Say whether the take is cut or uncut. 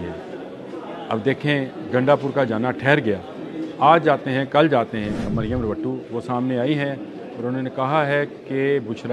cut